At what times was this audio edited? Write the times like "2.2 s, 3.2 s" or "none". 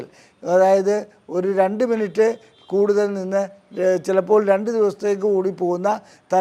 none